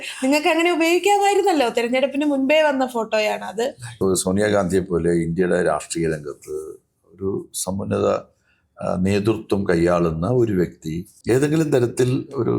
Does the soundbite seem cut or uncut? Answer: cut